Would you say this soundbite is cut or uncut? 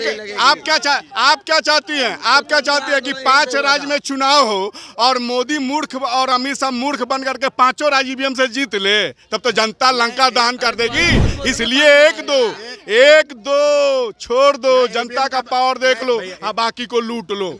uncut